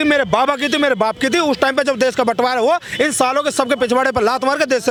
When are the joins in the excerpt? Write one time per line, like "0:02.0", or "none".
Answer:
none